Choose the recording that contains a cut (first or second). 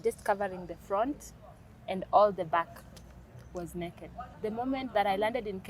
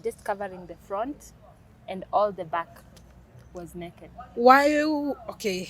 first